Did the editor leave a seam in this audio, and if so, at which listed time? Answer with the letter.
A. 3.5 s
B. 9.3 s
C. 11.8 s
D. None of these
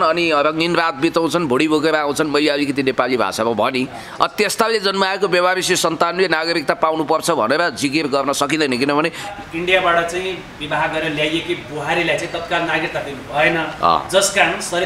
B